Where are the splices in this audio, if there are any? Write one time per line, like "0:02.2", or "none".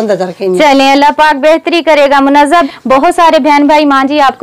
0:02.5

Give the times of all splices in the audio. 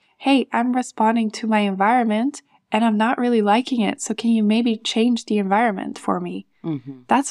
none

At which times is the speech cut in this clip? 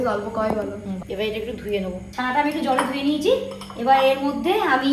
none

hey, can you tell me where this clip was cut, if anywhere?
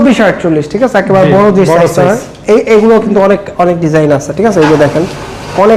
none

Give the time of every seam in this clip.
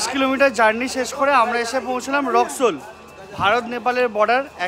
none

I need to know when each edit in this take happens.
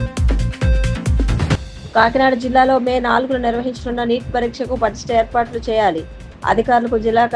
none

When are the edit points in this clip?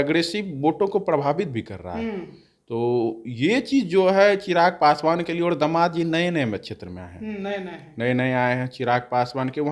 none

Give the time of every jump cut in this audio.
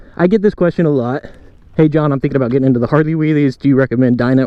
none

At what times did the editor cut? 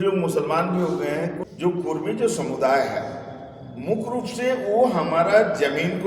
0:01.4

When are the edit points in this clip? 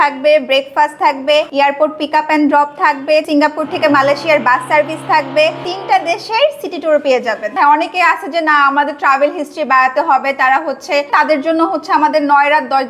0:01.5
0:03.3
0:05.7
0:07.6
0:11.1

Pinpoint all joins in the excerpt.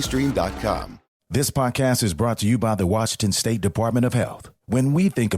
0:01.0

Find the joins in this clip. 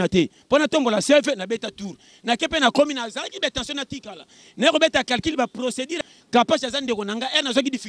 0:05.9

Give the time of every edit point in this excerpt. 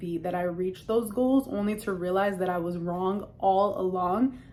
none

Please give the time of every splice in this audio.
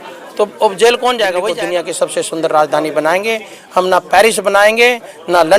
0:01.5

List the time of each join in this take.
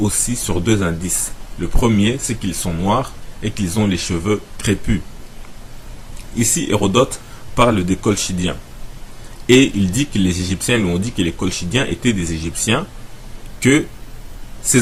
none

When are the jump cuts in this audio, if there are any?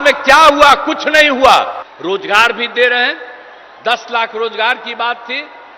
0:01.8

